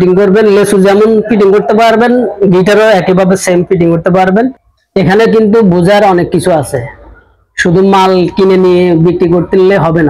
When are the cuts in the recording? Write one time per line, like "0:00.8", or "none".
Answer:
0:04.7